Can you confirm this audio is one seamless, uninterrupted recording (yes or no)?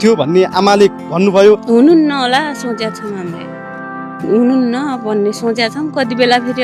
no